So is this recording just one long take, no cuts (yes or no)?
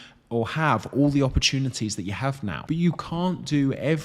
no